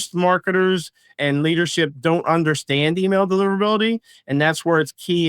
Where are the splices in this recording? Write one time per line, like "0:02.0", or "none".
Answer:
0:01.1